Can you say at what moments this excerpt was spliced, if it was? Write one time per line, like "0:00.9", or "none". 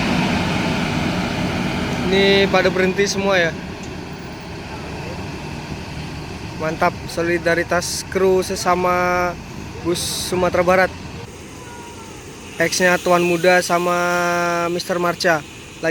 0:11.2